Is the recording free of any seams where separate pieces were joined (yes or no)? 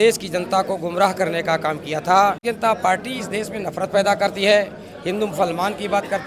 no